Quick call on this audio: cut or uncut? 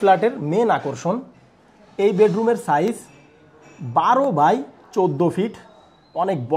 uncut